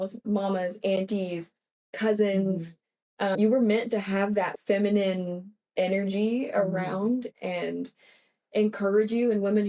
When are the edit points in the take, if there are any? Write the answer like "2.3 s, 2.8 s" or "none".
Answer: none